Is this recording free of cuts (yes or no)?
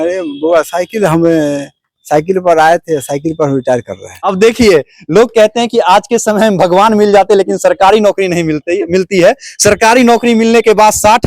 no